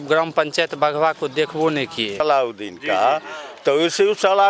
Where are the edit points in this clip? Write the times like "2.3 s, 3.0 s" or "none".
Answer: 2.2 s